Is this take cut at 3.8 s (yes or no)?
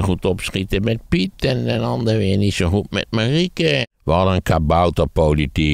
yes